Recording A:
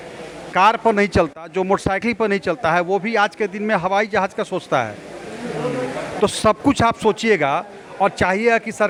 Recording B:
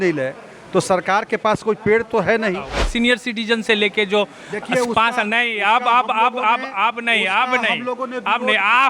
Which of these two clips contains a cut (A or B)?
B